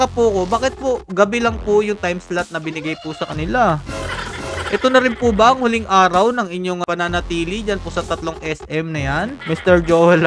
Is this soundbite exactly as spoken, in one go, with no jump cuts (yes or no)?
no